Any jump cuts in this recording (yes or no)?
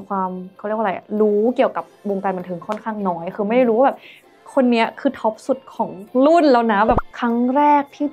yes